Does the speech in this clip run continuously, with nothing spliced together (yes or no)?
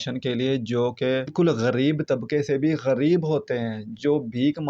no